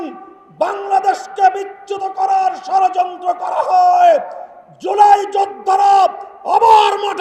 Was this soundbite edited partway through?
no; 0 cuts

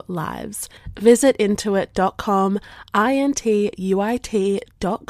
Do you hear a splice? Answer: no; 0 cuts

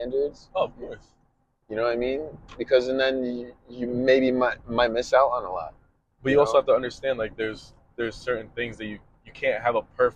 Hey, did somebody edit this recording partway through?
no; 0 cuts

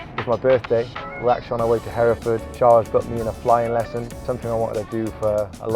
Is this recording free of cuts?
no; 3 cuts; at 1.1 s, 2.5 s, 4.2 s

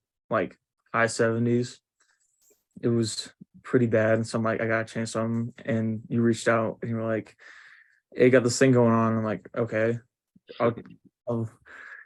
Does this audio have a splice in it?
no; 0 cuts

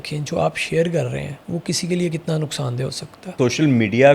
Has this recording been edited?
yes; 2 cuts; at 1.4 s, 3.3 s

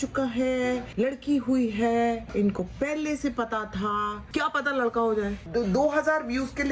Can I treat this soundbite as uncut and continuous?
no; 2 cuts; at 4.2 s, 5.4 s

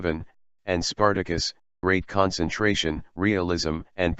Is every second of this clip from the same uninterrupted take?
yes; 0 cuts

